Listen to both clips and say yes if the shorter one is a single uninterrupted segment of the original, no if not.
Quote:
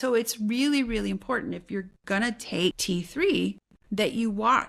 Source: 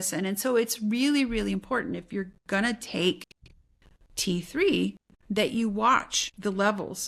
no